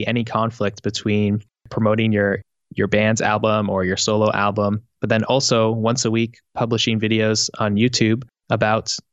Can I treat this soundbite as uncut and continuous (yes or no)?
no